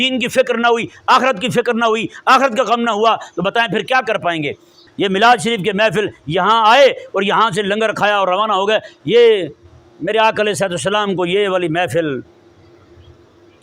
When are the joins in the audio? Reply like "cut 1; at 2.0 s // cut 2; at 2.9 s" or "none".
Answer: cut 1; at 4.8 s